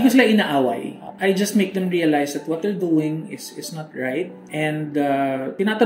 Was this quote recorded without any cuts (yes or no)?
yes